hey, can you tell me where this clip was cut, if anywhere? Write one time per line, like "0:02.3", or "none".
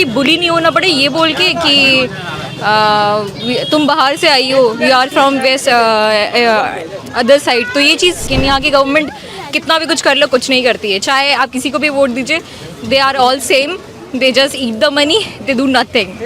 0:08.3